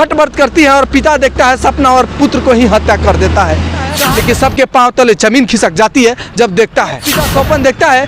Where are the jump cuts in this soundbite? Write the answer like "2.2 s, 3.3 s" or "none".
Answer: 4.0 s, 7.1 s